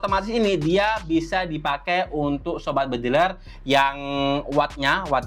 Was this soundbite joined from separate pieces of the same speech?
no; 0 cuts

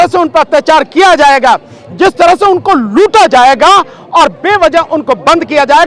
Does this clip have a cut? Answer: no; 0 cuts

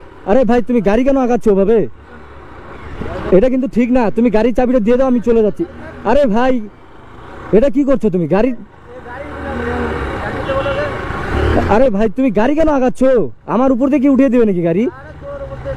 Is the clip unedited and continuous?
yes; 0 cuts

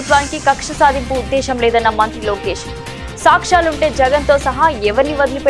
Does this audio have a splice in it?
no; 0 cuts

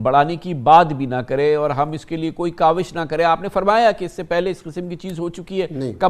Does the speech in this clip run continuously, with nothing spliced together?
yes; 0 cuts

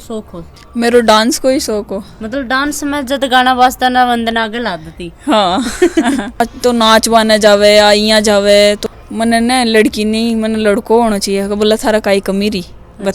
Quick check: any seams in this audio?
yes; 2 cuts; at 6.5 s, 8.8 s

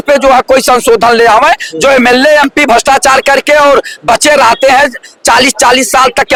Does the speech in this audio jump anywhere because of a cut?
no; 0 cuts

